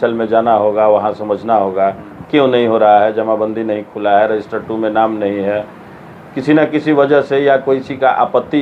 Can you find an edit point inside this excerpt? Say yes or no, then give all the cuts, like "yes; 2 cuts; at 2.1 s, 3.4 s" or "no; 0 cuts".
no; 0 cuts